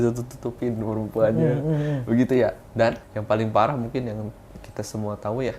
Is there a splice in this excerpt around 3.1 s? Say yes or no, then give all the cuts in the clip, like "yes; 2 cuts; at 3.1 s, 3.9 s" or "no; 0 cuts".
yes; 1 cut; at 3.1 s